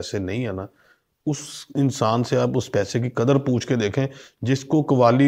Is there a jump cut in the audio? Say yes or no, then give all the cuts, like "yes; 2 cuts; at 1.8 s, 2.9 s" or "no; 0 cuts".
no; 0 cuts